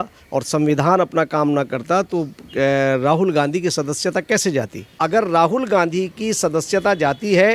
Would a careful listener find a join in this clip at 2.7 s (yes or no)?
no